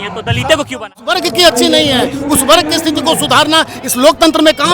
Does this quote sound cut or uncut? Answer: cut